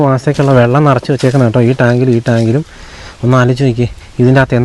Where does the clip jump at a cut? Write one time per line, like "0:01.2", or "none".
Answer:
none